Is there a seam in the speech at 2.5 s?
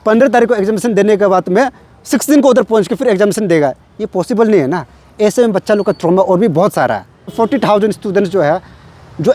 no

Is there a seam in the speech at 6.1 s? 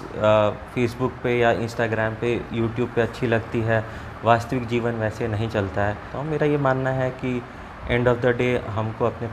yes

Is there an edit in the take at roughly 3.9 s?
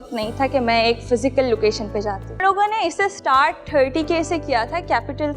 no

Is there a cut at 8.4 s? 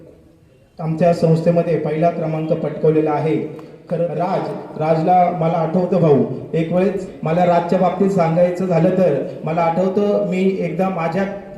no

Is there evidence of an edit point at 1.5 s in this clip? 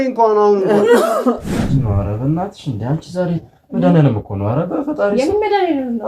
yes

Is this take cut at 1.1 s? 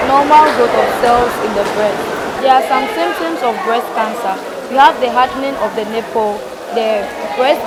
no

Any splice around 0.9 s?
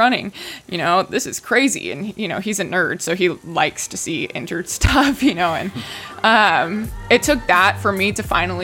no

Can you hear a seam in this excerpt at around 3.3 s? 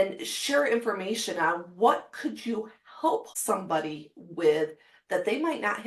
yes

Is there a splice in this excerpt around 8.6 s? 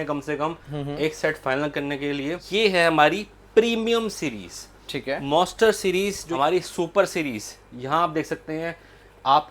no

